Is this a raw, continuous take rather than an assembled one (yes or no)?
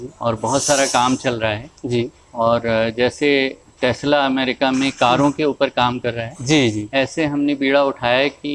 yes